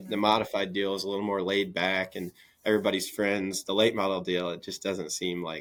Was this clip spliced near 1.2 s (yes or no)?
no